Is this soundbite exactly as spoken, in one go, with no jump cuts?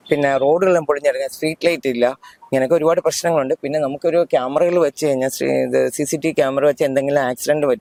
yes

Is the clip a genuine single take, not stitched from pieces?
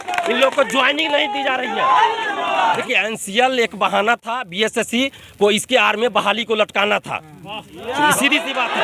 no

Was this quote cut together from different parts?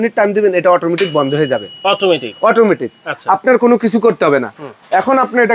no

